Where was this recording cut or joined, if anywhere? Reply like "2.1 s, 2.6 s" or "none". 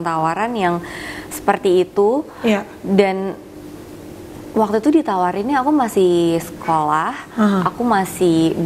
none